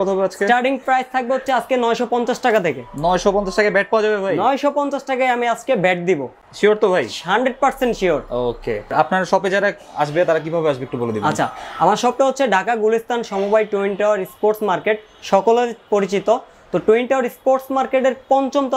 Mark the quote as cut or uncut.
uncut